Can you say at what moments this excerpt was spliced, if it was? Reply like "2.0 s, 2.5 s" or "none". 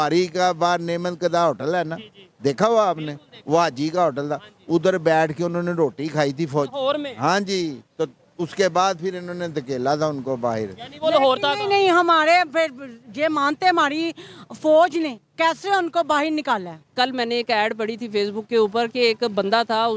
16.9 s

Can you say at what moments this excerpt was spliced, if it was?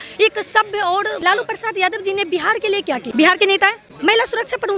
1.2 s, 3.0 s, 3.9 s

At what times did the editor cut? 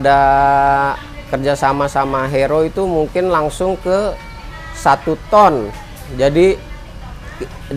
none

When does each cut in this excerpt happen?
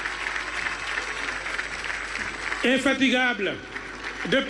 none

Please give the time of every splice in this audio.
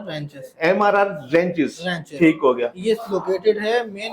none

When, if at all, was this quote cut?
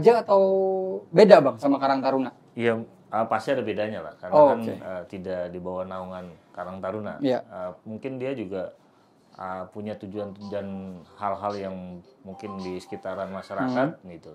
none

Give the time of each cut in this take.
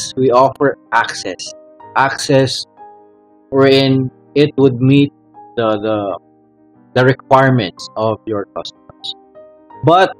none

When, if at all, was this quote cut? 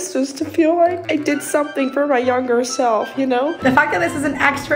3.6 s

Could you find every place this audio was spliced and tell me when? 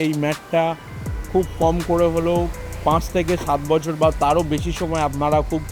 none

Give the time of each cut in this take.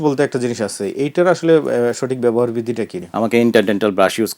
3.0 s

